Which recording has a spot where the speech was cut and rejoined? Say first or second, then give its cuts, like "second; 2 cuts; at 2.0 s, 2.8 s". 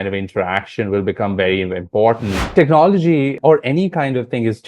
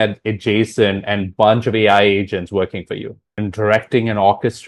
first; 2 cuts; at 2.5 s, 3.4 s